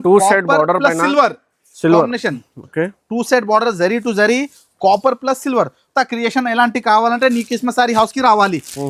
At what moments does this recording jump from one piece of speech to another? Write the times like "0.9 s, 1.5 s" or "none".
5.8 s